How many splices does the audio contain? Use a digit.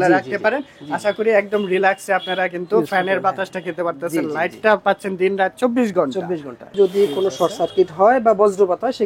1